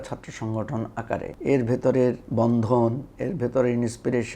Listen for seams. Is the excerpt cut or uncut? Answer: cut